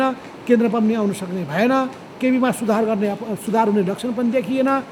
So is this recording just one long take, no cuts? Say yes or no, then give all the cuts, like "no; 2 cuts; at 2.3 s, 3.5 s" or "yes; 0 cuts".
yes; 0 cuts